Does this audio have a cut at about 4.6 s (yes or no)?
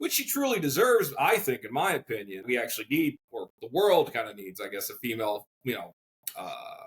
no